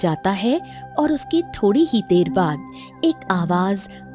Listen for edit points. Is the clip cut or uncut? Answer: uncut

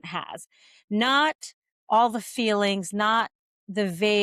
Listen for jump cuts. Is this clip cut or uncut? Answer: uncut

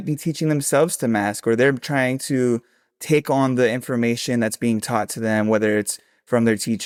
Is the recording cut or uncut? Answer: uncut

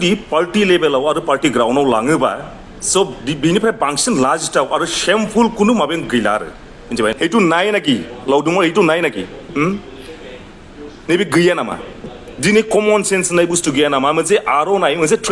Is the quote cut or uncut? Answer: cut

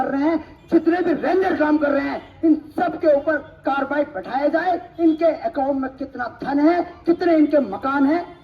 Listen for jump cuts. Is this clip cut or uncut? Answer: uncut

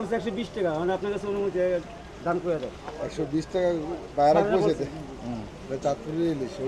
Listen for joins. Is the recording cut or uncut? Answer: uncut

